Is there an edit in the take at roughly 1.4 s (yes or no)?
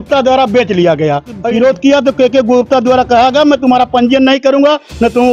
yes